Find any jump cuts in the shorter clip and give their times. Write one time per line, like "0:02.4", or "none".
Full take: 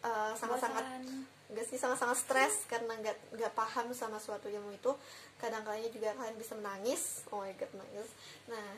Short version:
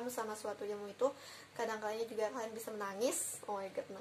none